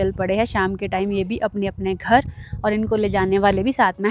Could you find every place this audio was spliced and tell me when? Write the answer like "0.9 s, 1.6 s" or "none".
none